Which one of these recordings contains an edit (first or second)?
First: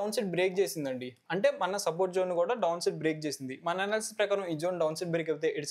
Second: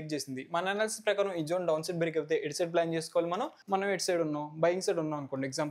second